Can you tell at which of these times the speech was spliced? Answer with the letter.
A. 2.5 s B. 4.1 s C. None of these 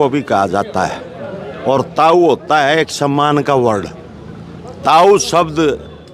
C